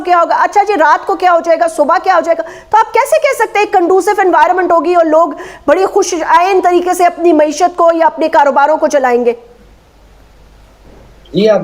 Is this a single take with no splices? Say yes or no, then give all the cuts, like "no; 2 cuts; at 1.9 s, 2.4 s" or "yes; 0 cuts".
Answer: yes; 0 cuts